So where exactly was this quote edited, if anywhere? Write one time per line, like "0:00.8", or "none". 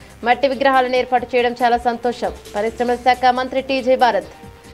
none